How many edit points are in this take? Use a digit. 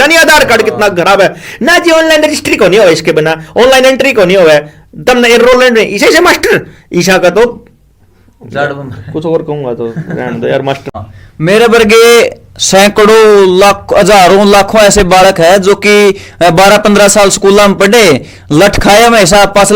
1